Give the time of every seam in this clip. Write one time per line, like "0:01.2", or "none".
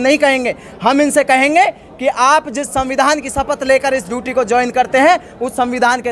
none